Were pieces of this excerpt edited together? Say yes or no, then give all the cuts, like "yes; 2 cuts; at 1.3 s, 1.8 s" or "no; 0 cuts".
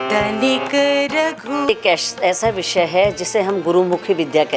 yes; 1 cut; at 1.7 s